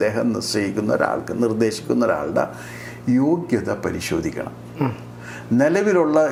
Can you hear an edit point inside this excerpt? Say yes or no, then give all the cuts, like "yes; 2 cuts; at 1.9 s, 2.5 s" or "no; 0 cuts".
no; 0 cuts